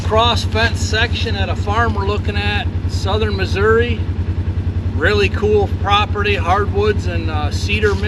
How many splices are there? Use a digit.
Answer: 0